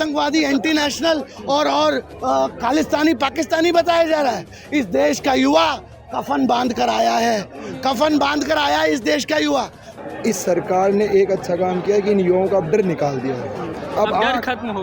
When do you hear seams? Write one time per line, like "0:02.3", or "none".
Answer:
0:09.9

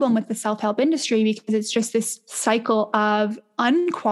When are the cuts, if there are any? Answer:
0:02.2

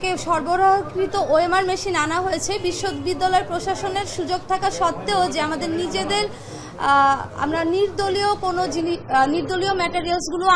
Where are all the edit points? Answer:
none

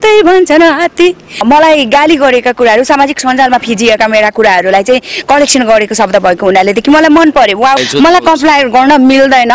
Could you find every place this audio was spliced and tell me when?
0:01.4
0:07.8

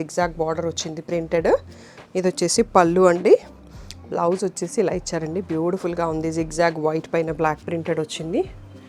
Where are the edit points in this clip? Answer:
none

